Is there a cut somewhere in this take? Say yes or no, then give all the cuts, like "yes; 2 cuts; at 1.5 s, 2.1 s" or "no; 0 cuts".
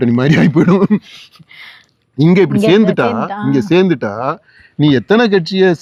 no; 0 cuts